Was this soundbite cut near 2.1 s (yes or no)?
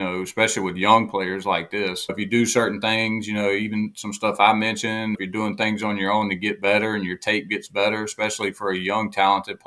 yes